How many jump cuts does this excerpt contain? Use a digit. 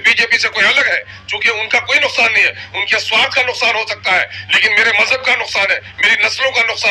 0